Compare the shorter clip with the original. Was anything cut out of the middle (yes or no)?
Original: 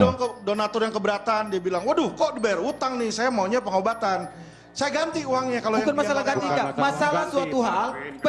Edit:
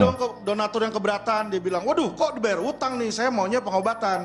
no